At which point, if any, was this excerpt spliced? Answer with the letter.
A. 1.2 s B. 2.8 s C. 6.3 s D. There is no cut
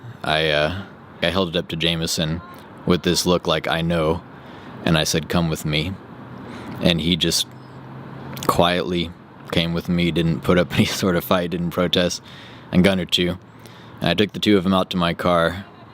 A